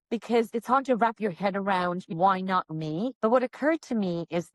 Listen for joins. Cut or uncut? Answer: cut